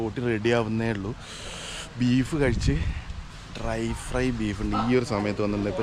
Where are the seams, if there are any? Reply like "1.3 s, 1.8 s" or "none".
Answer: none